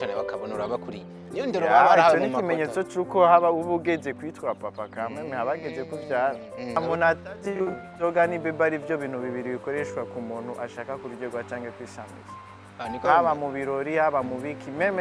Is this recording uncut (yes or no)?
no